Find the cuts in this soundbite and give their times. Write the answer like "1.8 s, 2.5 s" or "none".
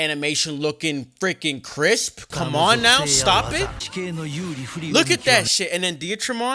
3.8 s, 4.9 s